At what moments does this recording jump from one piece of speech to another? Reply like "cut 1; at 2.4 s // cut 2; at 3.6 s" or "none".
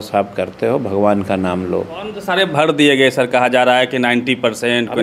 cut 1; at 2.2 s